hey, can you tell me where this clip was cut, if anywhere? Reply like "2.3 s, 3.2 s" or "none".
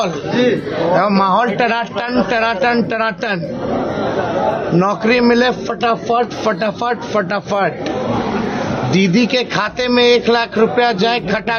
none